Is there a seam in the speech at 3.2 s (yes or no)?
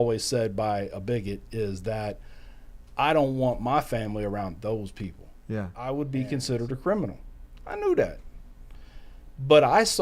no